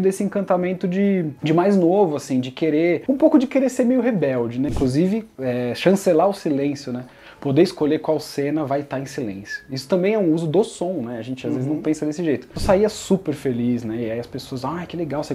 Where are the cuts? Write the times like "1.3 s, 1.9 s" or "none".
4.7 s, 12.5 s

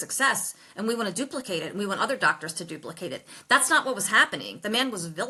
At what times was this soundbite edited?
none

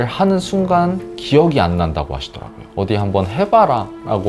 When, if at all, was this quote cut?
2.7 s

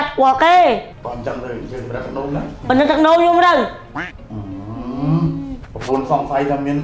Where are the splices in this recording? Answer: 0.9 s

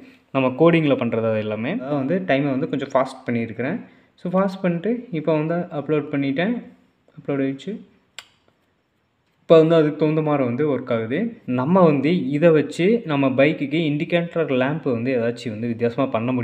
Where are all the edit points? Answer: 1.9 s, 11.4 s

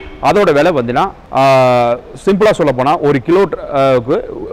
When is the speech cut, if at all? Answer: 1.2 s

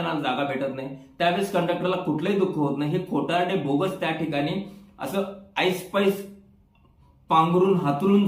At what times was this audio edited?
none

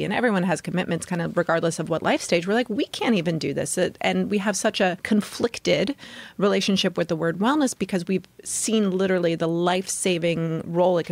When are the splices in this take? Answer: 5.0 s

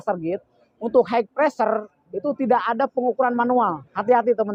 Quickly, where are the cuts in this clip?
none

